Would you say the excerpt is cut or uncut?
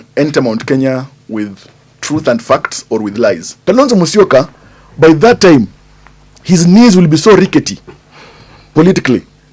cut